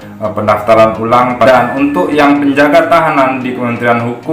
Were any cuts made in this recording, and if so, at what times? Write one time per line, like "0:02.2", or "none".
0:01.5